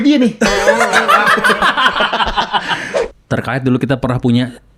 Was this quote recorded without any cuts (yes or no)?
no